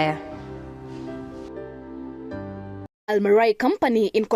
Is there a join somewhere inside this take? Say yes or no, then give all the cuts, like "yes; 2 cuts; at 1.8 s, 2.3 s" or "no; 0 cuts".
yes; 1 cut; at 3.0 s